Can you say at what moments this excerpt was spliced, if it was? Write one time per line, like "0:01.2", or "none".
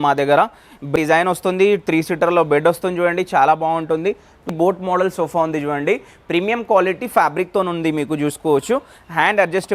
0:00.9
0:04.4